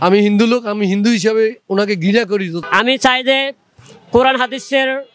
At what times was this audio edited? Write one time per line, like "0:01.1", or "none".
0:02.6